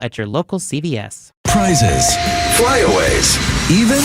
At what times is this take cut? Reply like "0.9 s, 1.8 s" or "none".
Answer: 1.2 s